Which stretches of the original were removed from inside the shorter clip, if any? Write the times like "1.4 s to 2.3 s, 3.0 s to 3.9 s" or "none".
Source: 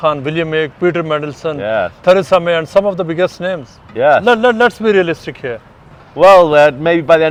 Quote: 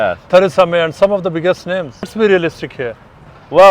3.9 s to 4.8 s